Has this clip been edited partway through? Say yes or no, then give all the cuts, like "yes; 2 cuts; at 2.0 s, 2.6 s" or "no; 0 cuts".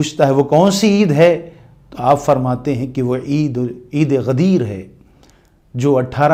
no; 0 cuts